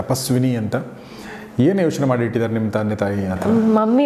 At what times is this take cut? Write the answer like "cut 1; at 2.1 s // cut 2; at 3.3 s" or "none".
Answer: none